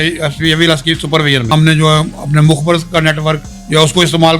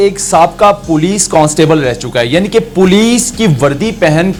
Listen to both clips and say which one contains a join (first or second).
first